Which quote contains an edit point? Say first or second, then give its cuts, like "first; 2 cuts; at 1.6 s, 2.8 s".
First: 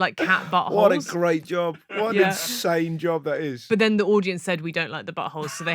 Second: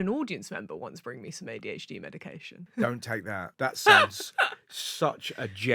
second; 2 cuts; at 2.6 s, 3.5 s